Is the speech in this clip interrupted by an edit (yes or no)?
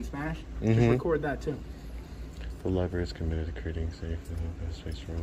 no